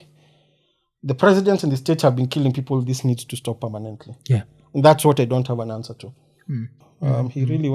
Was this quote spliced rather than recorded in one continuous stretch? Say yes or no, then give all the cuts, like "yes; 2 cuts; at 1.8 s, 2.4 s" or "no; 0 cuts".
yes; 1 cut; at 6.8 s